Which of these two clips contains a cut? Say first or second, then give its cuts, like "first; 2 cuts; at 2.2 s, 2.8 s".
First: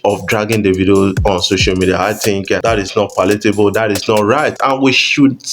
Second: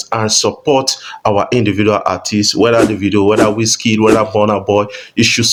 first; 2 cuts; at 2.6 s, 4.6 s